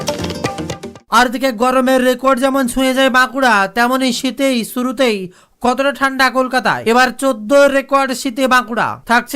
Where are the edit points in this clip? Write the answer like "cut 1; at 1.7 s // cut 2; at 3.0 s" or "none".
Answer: cut 1; at 0.9 s